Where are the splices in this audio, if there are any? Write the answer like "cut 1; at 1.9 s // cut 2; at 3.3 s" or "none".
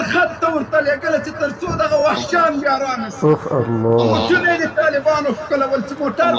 none

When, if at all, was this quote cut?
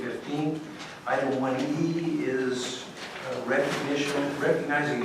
cut 1; at 2.7 s

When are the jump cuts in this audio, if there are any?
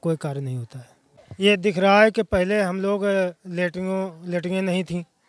none

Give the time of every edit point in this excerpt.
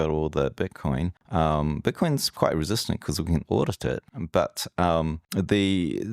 cut 1; at 1.2 s // cut 2; at 4.1 s // cut 3; at 5.2 s

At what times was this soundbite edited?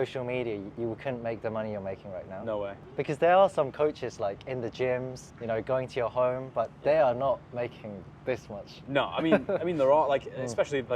none

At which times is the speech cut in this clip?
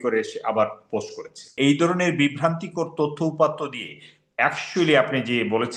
cut 1; at 1.5 s

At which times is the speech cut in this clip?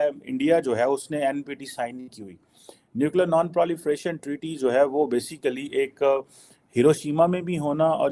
none

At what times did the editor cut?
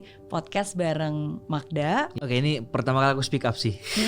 cut 1; at 2.2 s

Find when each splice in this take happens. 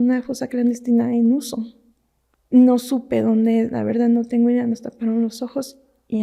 none

